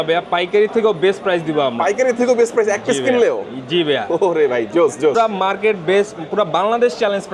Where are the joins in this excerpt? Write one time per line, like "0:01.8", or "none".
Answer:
0:05.2